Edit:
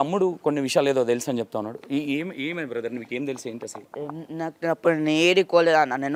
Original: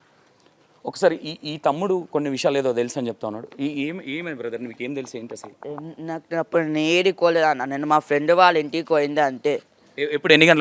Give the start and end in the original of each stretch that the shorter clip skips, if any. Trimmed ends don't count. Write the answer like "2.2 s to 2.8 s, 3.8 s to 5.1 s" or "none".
none